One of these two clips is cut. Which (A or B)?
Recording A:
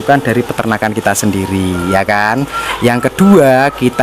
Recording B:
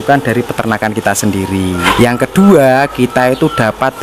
B